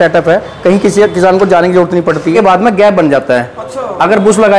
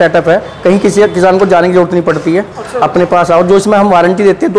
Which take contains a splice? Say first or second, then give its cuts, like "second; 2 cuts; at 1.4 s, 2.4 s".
first; 1 cut; at 2.3 s